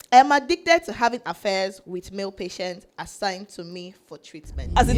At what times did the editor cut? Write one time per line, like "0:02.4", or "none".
none